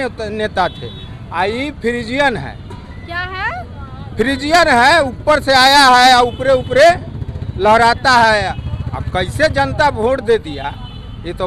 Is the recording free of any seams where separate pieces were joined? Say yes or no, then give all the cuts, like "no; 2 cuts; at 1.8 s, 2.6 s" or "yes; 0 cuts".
yes; 0 cuts